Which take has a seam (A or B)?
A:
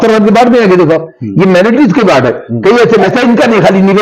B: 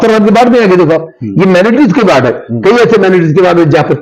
A